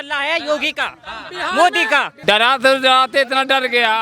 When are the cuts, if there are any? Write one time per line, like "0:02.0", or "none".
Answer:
0:02.1